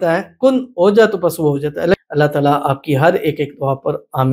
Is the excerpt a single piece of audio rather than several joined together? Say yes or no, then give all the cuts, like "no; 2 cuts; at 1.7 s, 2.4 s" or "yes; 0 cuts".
no; 1 cut; at 2.0 s